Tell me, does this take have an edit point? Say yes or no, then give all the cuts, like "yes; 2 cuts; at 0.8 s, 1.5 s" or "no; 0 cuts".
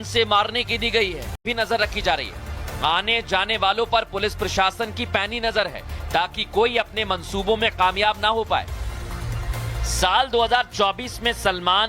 yes; 1 cut; at 1.5 s